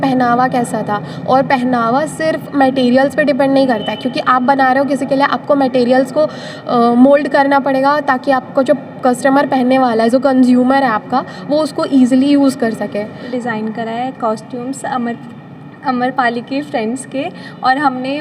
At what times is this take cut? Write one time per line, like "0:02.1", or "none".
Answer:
0:13.3